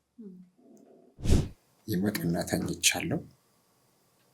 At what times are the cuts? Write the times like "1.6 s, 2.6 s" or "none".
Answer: 1.2 s